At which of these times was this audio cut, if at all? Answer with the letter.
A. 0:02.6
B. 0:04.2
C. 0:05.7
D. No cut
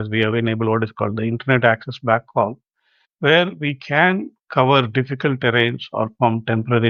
D